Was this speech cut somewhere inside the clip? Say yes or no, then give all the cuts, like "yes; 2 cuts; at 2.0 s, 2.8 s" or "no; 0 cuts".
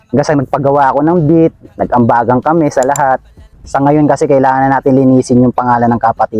yes; 1 cut; at 3.6 s